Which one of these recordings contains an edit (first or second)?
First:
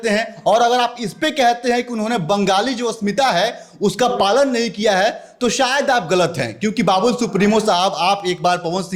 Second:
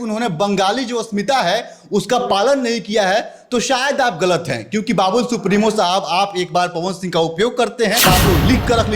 second